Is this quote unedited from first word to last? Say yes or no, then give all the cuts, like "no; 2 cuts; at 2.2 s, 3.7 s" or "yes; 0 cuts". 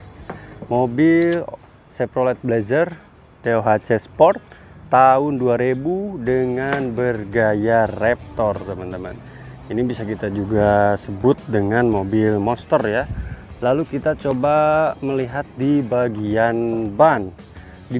yes; 0 cuts